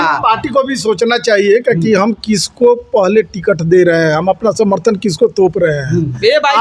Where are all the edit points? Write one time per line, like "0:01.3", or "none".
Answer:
none